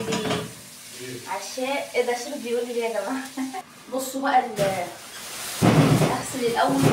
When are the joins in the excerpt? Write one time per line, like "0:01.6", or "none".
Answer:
0:03.7